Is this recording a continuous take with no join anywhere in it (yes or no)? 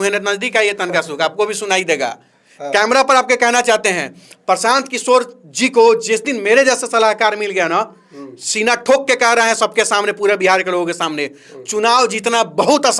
yes